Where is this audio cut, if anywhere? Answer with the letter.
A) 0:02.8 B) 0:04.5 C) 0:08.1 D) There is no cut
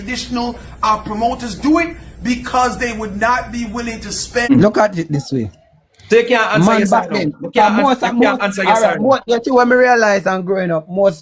B